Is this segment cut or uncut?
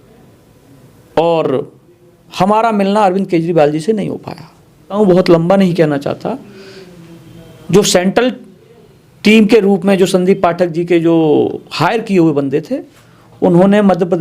cut